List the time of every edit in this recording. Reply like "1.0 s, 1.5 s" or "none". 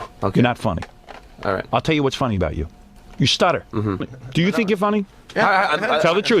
4.2 s